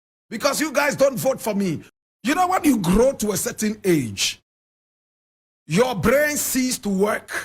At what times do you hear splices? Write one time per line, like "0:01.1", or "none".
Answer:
0:01.9